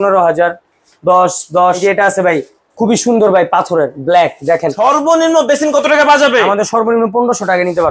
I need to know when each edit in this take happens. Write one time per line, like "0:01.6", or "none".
0:01.8
0:04.7